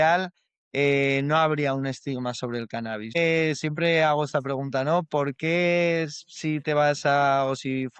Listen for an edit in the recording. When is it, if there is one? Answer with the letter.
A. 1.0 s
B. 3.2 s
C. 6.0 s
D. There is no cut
B